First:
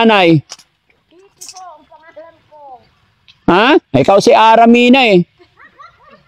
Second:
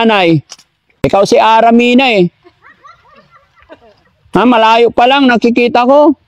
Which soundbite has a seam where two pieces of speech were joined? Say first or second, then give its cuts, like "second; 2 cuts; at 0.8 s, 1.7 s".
second; 1 cut; at 1.0 s